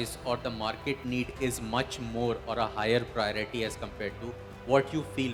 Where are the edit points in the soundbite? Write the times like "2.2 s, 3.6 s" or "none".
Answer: none